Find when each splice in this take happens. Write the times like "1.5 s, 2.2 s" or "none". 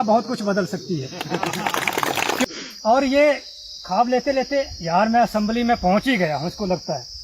2.4 s

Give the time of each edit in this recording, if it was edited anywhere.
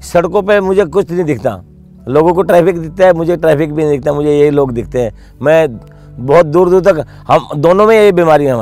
none

